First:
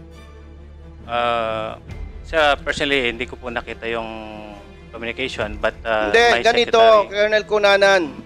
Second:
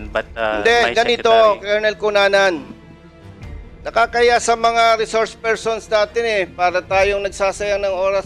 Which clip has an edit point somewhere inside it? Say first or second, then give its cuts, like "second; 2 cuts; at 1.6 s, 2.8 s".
first; 1 cut; at 1.0 s